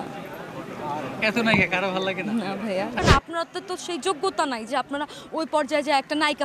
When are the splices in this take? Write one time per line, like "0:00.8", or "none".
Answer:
0:03.0